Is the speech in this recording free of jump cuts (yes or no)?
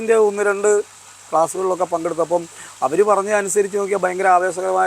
yes